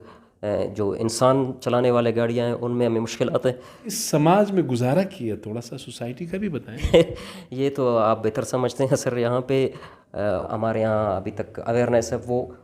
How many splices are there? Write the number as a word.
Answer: three